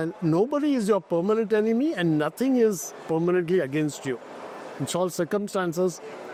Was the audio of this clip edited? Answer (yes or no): no